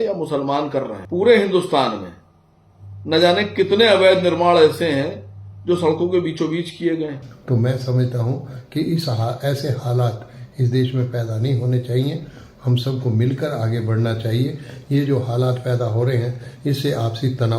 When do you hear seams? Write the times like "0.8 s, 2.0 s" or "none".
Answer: 1.0 s, 7.3 s